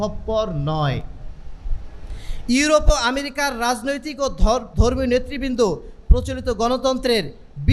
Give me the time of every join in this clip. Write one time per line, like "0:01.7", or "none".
none